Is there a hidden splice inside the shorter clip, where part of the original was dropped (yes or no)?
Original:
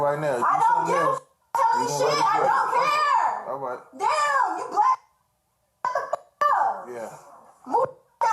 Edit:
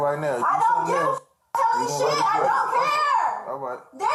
no